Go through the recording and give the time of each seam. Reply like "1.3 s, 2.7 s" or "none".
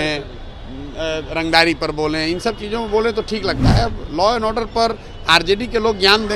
none

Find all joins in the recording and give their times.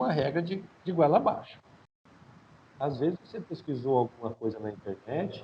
2.0 s

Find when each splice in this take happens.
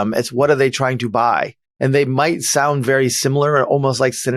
none

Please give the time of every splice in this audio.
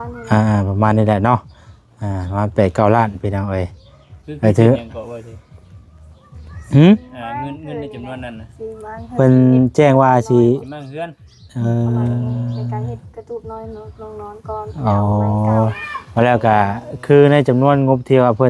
none

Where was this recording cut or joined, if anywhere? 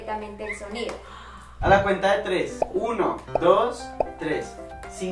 1.6 s

